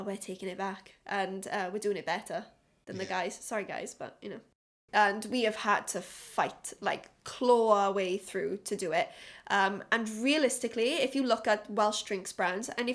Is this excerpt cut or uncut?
cut